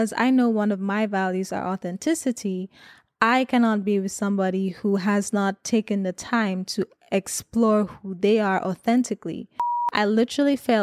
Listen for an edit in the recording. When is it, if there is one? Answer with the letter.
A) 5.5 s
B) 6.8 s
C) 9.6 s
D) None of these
C